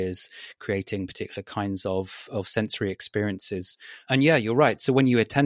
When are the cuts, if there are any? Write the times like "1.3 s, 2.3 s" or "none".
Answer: 4.0 s